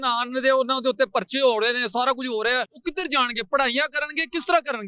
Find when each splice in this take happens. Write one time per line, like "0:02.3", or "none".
0:02.7